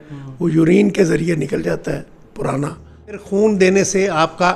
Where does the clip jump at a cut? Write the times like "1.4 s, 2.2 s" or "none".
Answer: 3.2 s